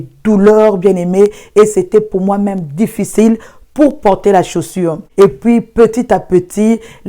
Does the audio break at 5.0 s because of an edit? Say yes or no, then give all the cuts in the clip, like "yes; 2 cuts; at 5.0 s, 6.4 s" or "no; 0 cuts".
yes; 1 cut; at 5.0 s